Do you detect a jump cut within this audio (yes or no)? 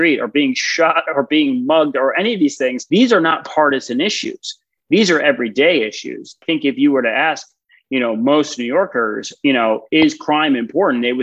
yes